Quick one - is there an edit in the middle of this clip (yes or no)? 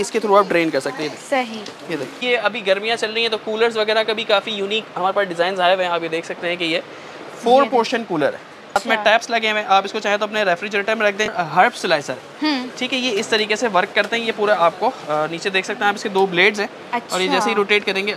yes